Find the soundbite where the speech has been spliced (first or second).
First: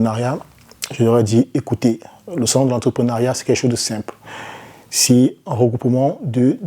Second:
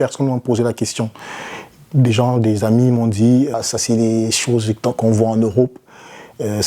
second